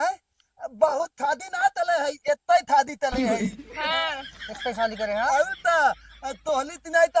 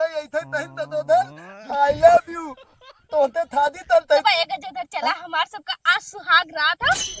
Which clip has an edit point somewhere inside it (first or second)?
second